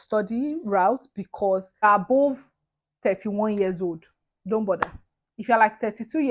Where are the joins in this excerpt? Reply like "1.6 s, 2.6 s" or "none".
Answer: 1.8 s